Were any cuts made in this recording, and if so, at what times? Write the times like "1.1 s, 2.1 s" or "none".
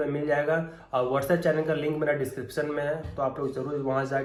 none